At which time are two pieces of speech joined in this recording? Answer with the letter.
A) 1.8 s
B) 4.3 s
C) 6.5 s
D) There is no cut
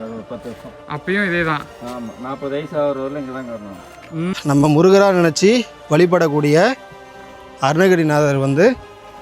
B